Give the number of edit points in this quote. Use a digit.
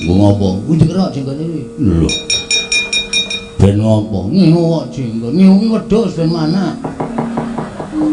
0